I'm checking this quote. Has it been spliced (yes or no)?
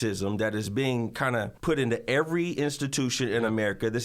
yes